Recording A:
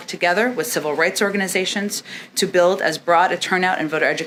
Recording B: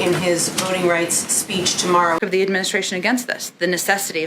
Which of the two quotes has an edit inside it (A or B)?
B